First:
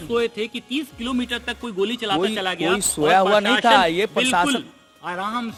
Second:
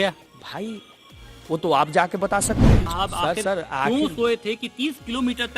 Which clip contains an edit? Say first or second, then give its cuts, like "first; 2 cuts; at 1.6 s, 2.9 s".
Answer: second; 1 cut; at 2.9 s